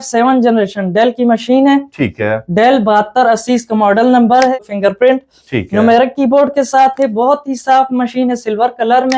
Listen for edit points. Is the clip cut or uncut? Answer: cut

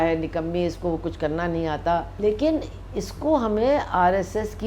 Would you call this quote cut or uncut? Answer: cut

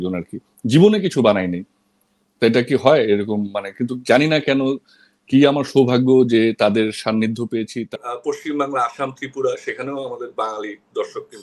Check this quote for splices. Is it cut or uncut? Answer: cut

